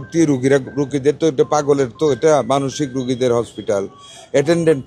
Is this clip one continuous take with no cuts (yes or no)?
yes